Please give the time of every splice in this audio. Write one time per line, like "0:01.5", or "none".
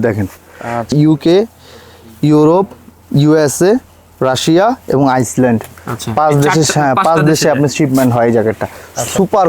0:00.9